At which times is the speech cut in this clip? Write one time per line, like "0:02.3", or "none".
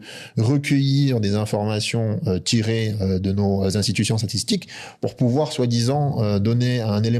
none